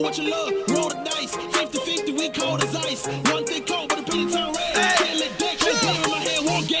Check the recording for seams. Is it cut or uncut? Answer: cut